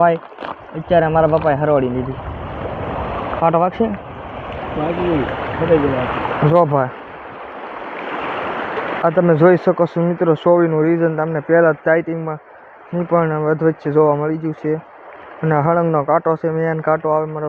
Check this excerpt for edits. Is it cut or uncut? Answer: uncut